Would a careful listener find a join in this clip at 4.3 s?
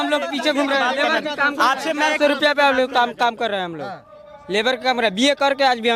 no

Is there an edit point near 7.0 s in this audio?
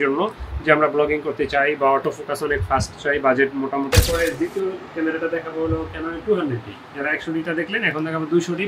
no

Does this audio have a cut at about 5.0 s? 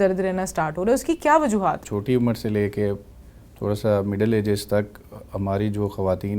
no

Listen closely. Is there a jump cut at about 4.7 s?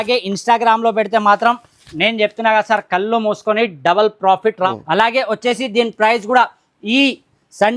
yes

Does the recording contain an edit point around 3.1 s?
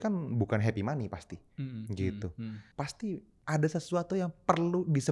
yes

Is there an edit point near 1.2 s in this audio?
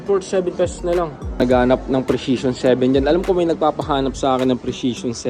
yes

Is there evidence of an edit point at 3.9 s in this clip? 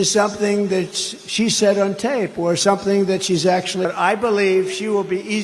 yes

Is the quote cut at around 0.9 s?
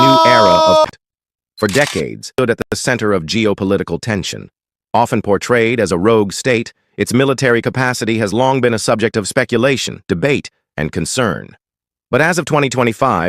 yes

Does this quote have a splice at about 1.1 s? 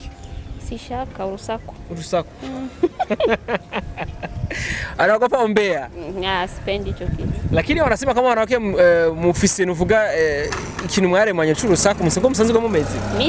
no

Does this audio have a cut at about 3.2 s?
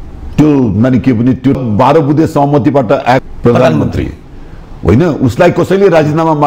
yes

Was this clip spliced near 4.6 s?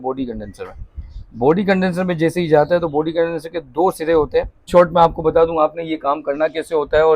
yes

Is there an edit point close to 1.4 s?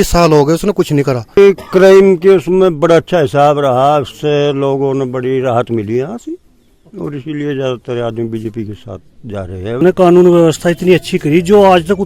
yes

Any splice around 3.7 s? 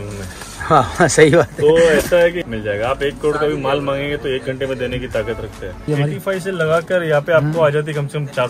no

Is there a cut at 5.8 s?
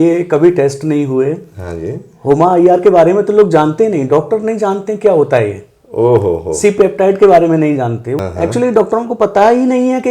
no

